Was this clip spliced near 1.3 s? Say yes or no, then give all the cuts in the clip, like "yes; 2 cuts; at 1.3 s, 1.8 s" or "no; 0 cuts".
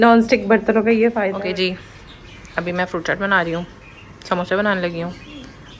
yes; 1 cut; at 1.3 s